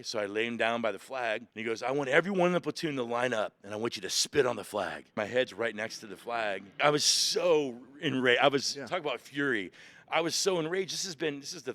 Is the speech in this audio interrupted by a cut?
yes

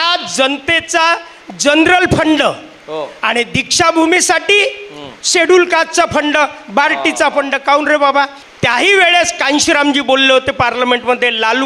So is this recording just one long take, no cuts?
no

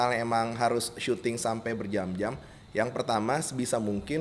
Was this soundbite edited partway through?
no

